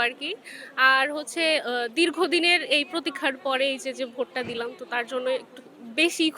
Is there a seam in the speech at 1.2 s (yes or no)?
no